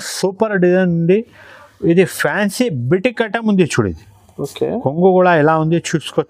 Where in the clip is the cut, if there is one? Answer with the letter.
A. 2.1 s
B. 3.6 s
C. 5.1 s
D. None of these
D